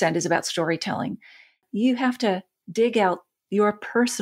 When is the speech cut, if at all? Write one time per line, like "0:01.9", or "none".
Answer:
0:01.6
0:02.5